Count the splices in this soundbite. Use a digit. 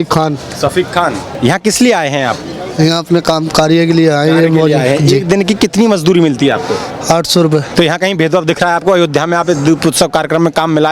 2